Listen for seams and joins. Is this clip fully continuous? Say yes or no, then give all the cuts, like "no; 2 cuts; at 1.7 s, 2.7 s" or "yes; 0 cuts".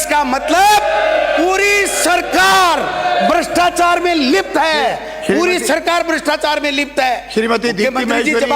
yes; 0 cuts